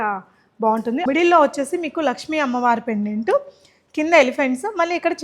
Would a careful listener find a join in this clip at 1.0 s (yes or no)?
yes